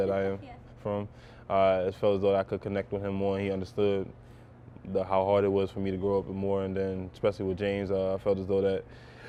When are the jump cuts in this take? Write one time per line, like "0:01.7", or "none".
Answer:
none